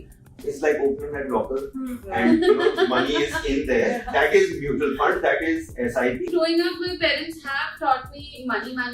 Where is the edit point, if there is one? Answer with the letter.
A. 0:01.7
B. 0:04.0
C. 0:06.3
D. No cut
C